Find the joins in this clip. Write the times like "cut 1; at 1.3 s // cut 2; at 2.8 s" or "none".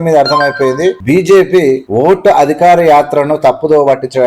cut 1; at 1.0 s // cut 2; at 1.9 s